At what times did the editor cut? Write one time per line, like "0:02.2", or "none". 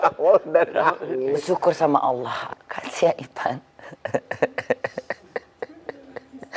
0:02.5